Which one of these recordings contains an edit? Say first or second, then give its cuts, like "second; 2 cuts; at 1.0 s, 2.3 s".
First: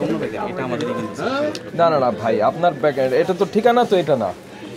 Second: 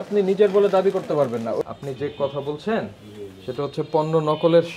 second; 1 cut; at 1.6 s